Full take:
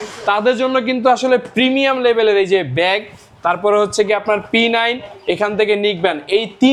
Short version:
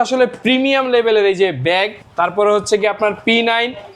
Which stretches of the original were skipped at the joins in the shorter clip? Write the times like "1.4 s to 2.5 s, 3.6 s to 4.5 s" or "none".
3.1 s to 3.3 s